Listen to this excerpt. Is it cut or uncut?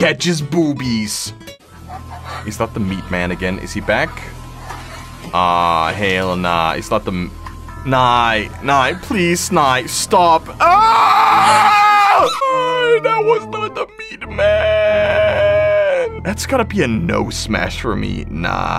cut